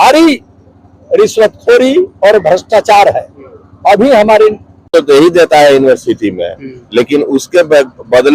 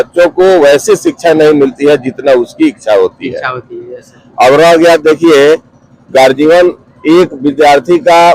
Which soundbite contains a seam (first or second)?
first